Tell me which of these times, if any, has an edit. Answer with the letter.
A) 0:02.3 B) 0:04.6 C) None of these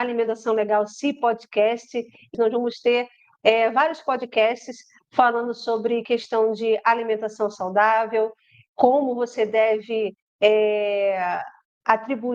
A